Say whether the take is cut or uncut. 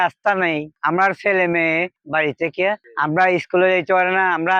cut